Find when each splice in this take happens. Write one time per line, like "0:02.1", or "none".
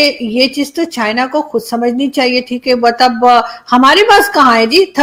none